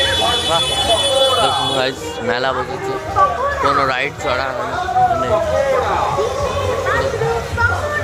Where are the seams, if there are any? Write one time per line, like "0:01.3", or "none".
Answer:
none